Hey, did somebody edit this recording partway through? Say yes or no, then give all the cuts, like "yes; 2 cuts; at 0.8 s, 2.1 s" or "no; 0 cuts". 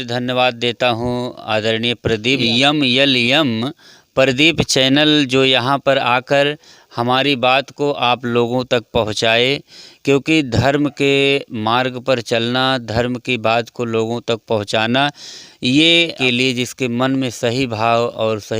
yes; 2 cuts; at 2.4 s, 16.2 s